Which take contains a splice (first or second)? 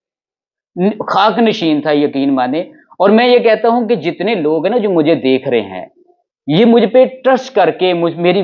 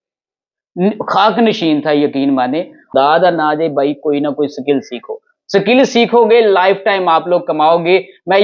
second